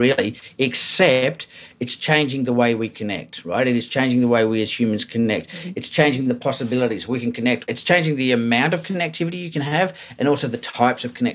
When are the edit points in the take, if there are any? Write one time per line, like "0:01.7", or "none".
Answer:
0:07.7
0:09.4